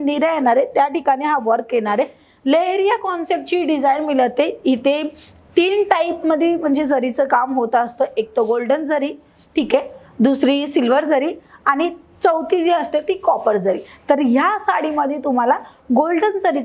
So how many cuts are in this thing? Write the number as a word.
zero